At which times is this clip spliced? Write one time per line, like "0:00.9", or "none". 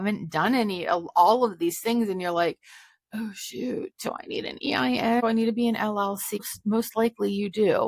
0:05.2
0:06.4